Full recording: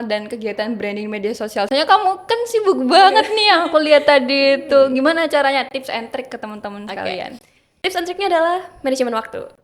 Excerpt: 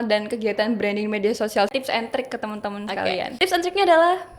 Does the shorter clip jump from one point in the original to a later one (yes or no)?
yes